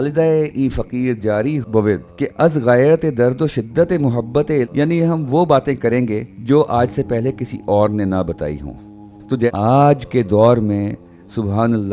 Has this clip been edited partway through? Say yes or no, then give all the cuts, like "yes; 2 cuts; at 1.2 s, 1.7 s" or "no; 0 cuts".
yes; 2 cuts; at 4.7 s, 9.5 s